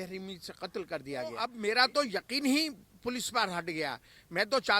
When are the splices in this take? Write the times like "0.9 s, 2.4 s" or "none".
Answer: 1.5 s